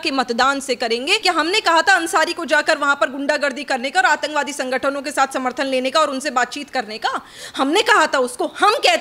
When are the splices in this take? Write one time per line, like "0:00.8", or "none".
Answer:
0:01.2